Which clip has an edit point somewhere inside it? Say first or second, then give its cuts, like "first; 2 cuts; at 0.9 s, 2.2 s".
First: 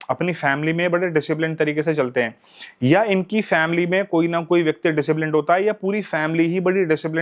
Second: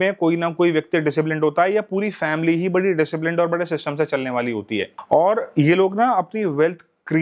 second; 1 cut; at 4.9 s